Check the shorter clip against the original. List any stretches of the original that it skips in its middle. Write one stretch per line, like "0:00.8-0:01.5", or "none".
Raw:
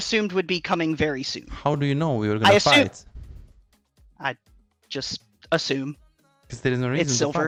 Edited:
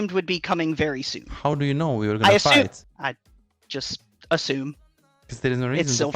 0:03.1-0:04.1